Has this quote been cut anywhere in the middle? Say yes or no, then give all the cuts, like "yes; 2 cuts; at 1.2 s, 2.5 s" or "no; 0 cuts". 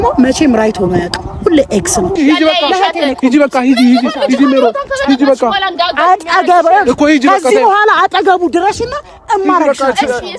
yes; 1 cut; at 2.2 s